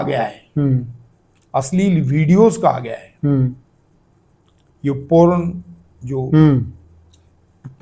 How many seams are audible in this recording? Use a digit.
0